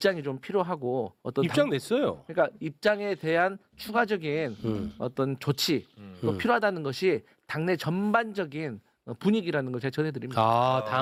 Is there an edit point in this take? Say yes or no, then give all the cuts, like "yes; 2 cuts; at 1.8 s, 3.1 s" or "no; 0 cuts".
no; 0 cuts